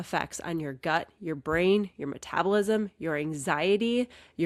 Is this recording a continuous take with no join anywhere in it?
yes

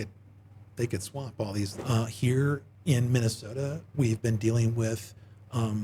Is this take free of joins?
no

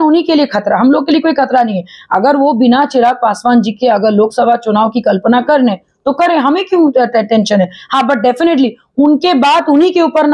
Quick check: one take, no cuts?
yes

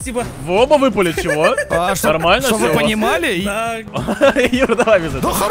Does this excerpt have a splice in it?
yes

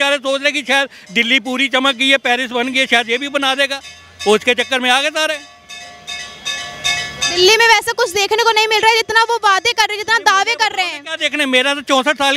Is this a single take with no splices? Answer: yes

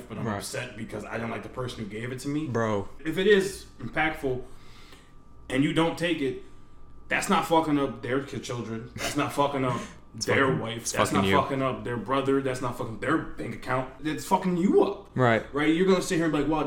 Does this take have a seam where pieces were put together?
yes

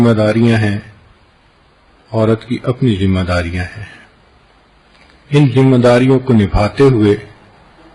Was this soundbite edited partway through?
yes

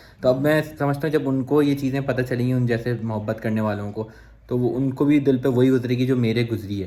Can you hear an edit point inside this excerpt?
no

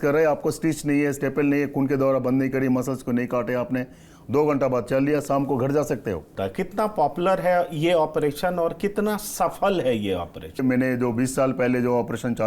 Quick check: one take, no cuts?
no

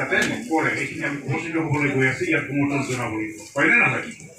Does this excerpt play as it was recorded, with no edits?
no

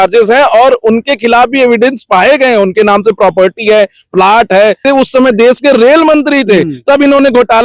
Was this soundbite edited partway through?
yes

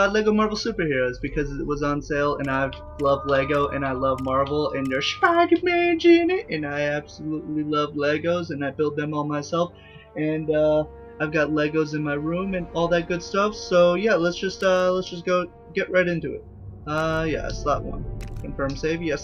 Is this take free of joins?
no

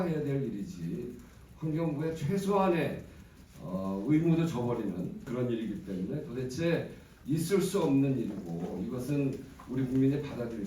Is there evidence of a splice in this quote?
yes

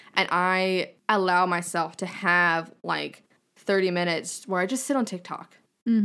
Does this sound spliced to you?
yes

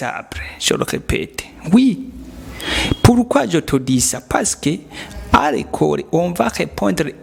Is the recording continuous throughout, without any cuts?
yes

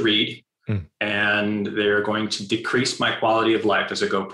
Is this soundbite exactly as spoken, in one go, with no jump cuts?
yes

